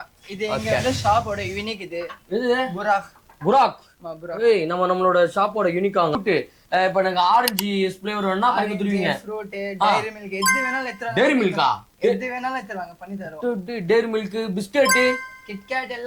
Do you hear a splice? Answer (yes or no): yes